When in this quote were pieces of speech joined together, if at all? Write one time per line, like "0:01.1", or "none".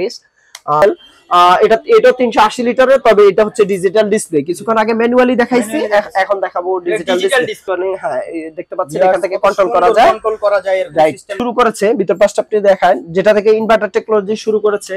0:00.8
0:07.6
0:11.4